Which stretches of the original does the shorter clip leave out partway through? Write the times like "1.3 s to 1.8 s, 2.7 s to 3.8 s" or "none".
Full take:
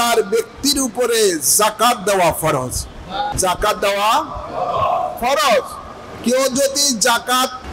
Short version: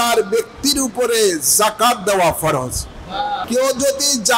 3.3 s to 6.1 s

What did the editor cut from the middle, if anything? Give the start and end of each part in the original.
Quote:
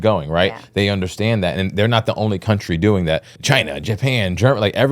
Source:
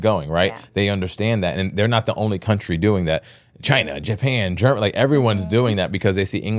3.3 s to 3.5 s

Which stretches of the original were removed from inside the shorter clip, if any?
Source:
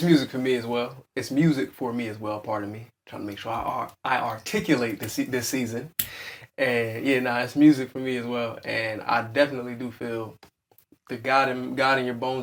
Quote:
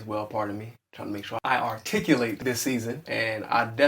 3.5 s to 4.0 s, 5.5 s to 8.5 s

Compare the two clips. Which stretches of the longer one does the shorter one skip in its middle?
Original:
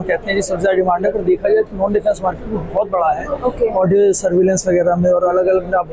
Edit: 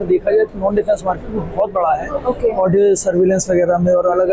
none

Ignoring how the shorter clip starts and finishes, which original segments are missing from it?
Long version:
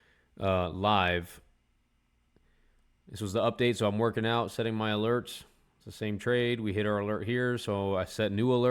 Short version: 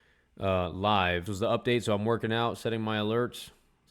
1.3 s to 3.2 s

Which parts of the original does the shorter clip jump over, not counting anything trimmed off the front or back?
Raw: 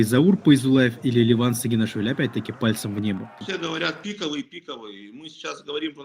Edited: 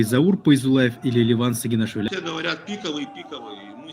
2.1 s to 3.5 s

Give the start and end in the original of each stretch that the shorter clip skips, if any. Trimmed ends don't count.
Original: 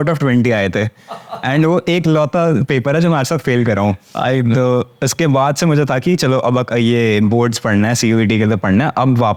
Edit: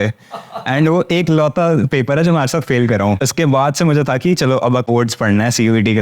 4.0 s to 5.1 s, 6.7 s to 7.3 s

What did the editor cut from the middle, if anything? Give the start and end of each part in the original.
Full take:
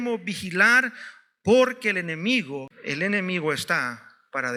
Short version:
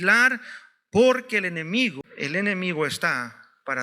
2.6 s to 2.7 s

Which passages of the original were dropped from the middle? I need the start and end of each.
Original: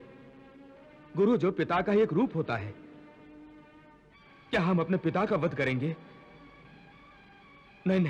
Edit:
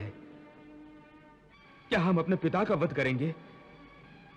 none

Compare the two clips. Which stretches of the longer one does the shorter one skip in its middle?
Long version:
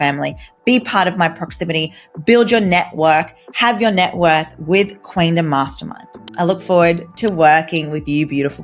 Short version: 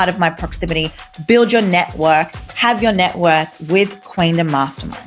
none

